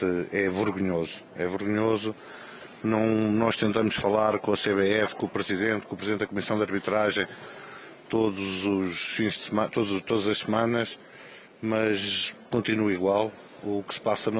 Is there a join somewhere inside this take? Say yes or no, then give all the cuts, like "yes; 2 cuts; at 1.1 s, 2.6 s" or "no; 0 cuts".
yes; 1 cut; at 2.3 s